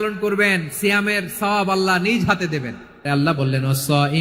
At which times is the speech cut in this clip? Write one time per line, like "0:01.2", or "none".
0:03.1